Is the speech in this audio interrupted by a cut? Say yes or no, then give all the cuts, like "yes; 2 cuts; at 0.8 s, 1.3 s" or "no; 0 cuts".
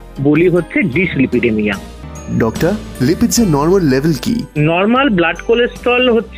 yes; 1 cut; at 2.0 s